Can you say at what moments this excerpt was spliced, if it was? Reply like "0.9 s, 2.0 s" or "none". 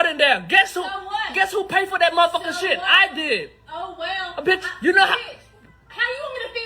4.1 s